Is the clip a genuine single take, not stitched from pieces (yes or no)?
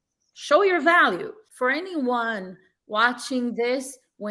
no